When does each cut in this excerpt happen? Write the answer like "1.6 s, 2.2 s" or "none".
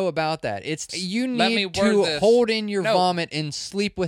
1.0 s